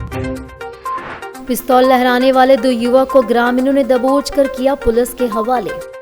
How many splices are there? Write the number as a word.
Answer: one